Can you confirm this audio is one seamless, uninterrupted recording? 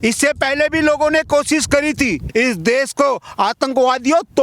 no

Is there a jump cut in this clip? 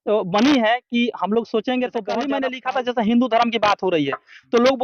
yes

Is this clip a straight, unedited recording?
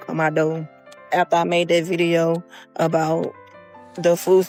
yes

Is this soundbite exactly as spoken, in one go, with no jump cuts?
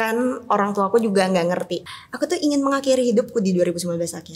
no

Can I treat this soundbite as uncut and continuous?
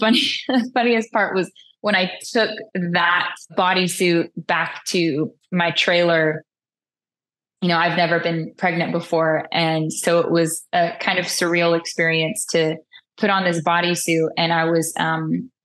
yes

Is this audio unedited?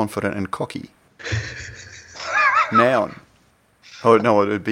yes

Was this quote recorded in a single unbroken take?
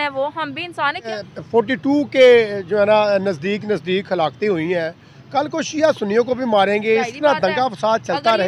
no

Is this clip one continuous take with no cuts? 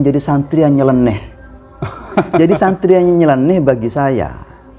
yes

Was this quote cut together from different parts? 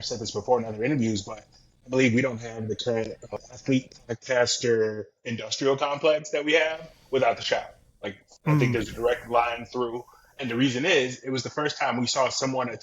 yes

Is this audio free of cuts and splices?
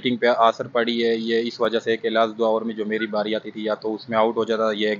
yes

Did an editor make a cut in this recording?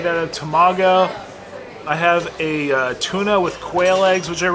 no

